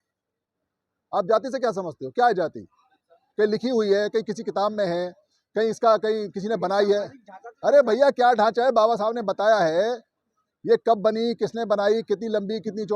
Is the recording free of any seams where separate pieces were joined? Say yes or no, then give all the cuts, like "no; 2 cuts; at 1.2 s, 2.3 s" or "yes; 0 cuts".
yes; 0 cuts